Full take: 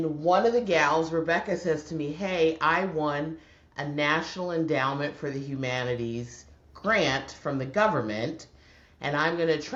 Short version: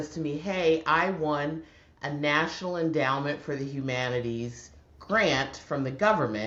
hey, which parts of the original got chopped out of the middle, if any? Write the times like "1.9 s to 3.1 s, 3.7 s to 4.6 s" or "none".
none